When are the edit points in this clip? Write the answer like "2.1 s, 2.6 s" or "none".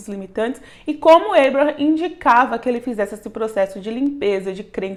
none